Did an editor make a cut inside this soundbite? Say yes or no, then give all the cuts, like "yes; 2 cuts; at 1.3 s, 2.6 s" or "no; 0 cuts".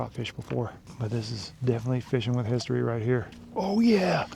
yes; 2 cuts; at 0.9 s, 3.4 s